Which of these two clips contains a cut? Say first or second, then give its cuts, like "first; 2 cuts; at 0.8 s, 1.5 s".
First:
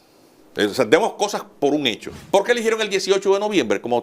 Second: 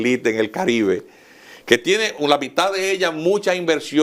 first; 1 cut; at 2.1 s